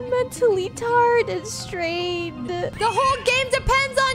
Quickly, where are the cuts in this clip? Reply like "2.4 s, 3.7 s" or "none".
2.7 s